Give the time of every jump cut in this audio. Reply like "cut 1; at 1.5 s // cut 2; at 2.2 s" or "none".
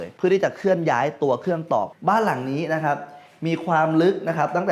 cut 1; at 1.9 s